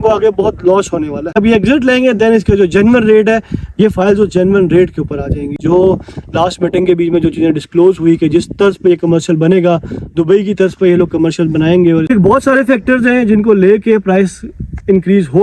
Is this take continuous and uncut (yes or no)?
no